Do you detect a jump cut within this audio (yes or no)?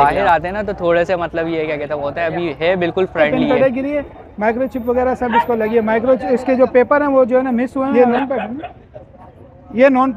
yes